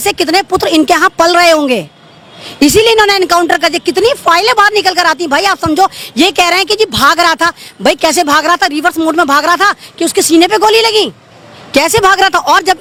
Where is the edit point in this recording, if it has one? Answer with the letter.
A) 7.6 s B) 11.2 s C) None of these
C